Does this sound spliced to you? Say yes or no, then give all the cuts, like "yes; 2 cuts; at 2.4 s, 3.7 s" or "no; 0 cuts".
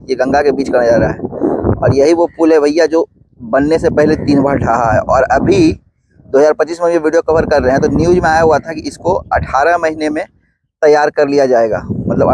no; 0 cuts